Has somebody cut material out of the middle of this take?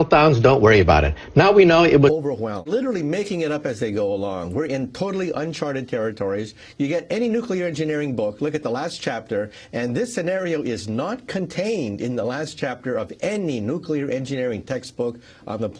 no; 0 cuts

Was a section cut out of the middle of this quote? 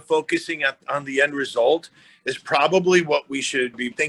no; 0 cuts

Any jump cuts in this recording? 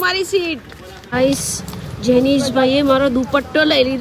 yes; 1 cut; at 1.1 s

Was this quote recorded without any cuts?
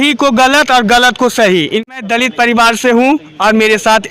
no; 1 cut; at 1.9 s

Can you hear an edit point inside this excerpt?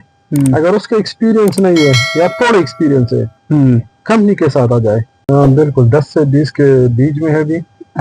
yes; 1 cut; at 5.1 s

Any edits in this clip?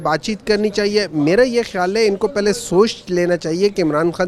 no; 0 cuts

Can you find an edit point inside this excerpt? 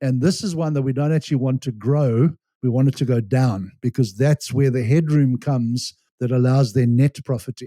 no; 0 cuts

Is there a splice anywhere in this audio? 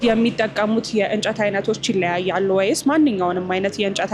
no; 0 cuts

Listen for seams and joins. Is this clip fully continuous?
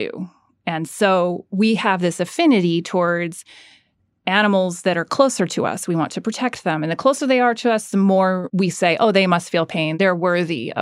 no; 2 cuts; at 8.5 s, 9.9 s

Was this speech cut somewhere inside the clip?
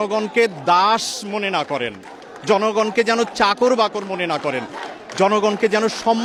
no; 0 cuts

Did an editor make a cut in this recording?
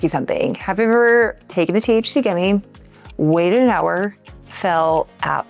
no; 0 cuts

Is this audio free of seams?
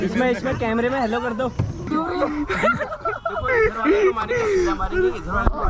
no; 1 cut; at 1.9 s

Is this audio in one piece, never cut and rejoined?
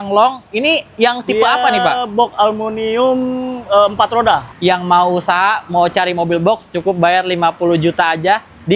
no; 1 cut; at 4.5 s

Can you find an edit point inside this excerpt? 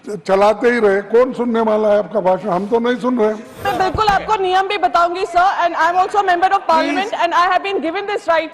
yes; 1 cut; at 3.6 s

